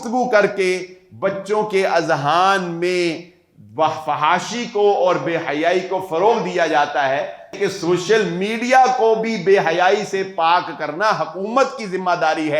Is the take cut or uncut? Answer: cut